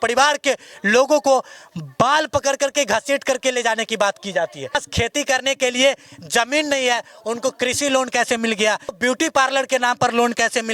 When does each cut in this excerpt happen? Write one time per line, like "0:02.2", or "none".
0:04.8
0:09.0